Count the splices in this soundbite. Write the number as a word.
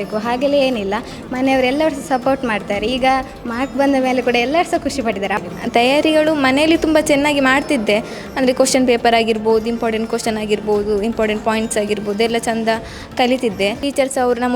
two